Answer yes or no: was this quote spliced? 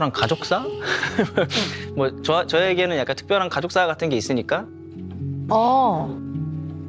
no